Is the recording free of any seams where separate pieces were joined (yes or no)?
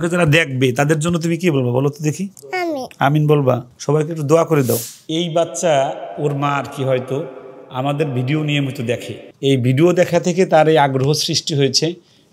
no